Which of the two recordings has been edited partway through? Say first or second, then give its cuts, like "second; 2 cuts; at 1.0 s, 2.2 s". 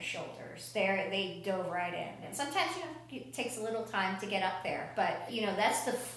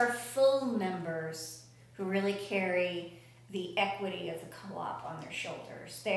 first; 2 cuts; at 2.2 s, 5.3 s